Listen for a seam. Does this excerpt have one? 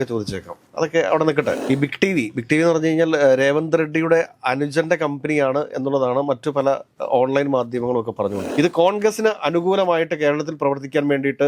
yes; 2 cuts; at 1.6 s, 8.5 s

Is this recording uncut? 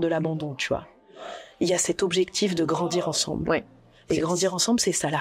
no; 1 cut; at 1.1 s

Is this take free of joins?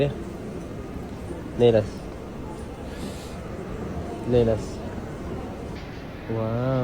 no; 1 cut; at 5.8 s

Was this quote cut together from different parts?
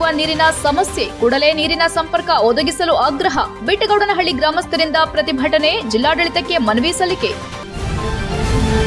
yes; 1 cut; at 7.6 s

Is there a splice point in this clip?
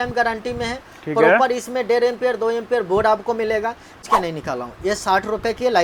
yes; 1 cut; at 4.0 s

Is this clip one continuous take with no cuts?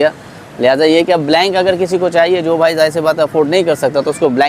yes; 0 cuts

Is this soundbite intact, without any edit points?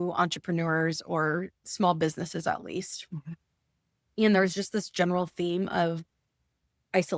no; 1 cut; at 1.6 s

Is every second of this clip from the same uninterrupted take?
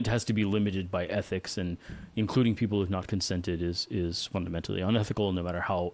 yes; 0 cuts

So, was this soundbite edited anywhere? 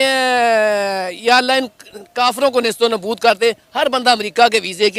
no; 0 cuts

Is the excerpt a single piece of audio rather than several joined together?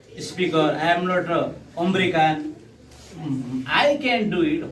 yes; 0 cuts

